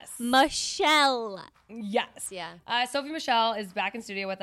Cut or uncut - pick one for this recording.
cut